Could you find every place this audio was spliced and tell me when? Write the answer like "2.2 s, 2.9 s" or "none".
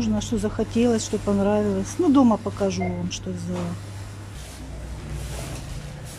none